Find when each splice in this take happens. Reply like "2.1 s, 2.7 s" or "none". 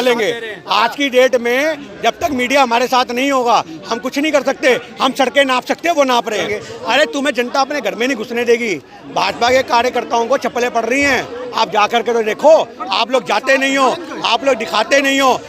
6.5 s